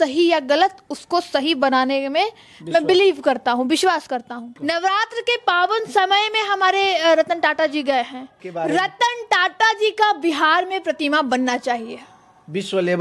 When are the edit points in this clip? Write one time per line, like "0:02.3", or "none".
0:04.5
0:08.4